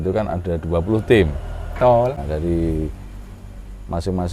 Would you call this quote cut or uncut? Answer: cut